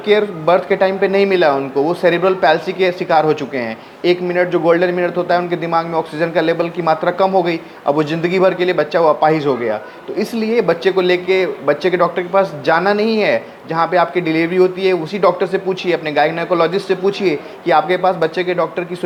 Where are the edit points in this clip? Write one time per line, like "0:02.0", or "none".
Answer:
none